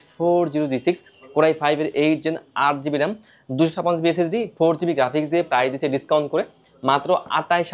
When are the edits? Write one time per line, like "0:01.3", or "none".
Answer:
none